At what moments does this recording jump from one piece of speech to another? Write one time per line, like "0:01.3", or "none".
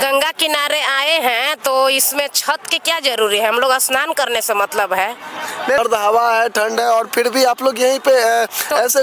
0:05.8